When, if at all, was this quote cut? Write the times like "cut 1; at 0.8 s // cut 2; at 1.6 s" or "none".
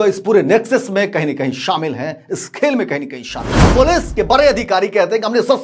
cut 1; at 3.7 s